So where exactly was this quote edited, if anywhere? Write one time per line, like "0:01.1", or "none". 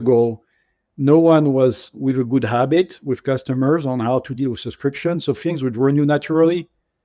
0:01.9